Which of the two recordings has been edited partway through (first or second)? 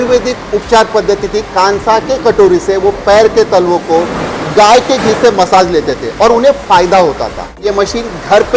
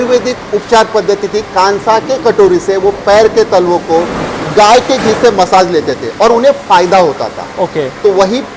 first